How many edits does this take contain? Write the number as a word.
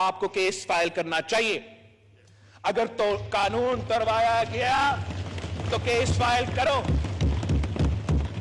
zero